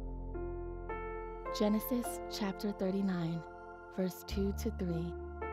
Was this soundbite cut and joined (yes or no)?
no